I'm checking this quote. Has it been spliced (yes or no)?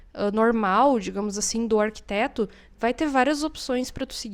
no